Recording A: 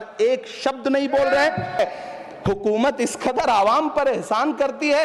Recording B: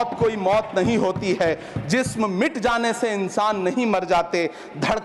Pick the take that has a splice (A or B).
A